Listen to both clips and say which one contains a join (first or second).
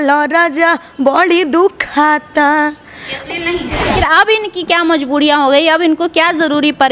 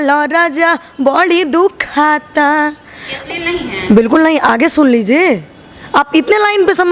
first